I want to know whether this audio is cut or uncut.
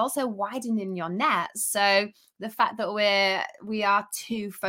uncut